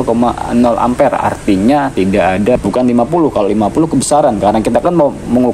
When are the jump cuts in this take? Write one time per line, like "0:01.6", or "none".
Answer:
0:02.5

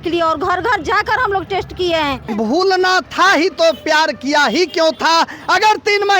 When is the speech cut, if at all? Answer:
0:02.3

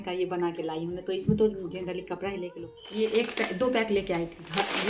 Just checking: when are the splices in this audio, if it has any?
0:02.5

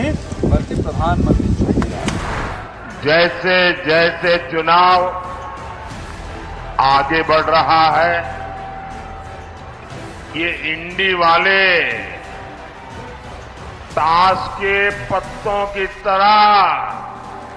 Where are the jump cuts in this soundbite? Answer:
0:02.2

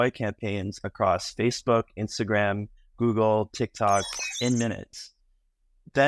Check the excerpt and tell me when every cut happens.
0:04.2

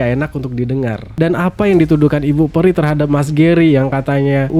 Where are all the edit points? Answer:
0:01.1

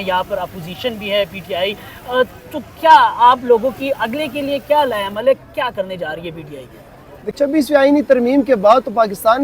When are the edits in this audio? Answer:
0:07.4

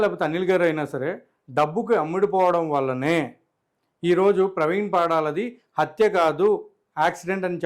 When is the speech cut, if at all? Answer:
none

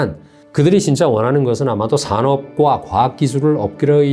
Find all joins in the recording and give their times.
none

